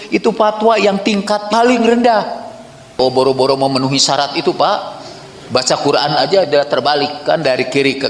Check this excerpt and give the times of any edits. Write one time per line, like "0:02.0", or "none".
0:03.0